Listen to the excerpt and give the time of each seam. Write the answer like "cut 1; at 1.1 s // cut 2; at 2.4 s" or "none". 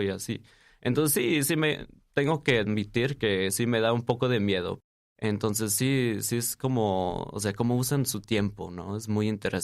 cut 1; at 4.7 s